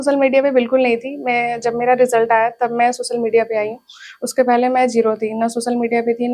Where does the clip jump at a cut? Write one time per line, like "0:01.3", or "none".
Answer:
none

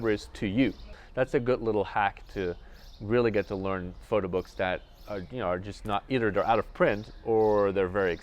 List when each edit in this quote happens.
0:01.0

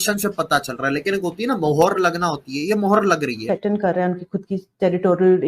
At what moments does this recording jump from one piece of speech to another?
0:03.4

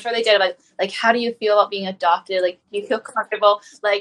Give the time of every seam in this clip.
none

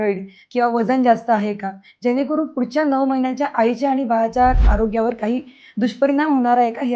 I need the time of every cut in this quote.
0:04.7

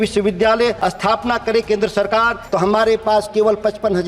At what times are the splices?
0:00.8
0:02.4

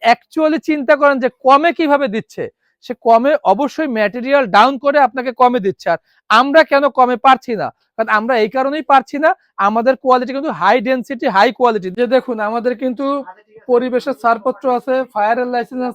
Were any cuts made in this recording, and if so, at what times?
0:11.9

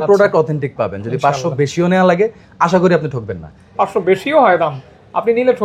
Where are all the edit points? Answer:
0:03.6

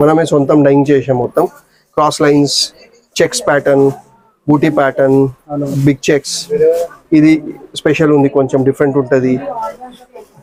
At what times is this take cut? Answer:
none

